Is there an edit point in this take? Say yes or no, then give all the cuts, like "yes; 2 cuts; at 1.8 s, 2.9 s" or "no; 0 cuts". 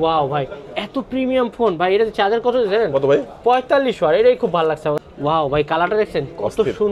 yes; 1 cut; at 5.0 s